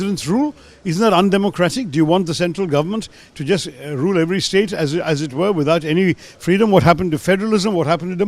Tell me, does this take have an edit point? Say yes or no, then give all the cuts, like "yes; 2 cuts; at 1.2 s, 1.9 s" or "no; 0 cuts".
no; 0 cuts